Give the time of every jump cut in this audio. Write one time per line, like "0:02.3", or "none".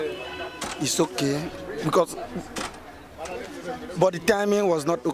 none